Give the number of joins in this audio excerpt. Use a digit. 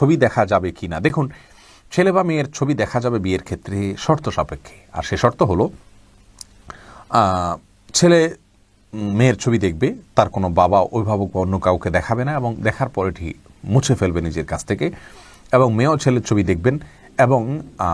0